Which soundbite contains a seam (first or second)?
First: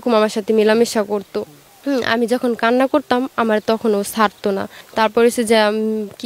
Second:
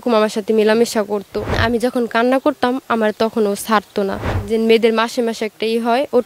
second